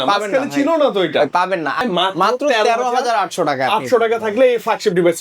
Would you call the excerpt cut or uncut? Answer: cut